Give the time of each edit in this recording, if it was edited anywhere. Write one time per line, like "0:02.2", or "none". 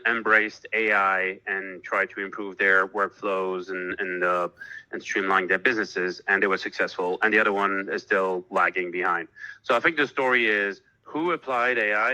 none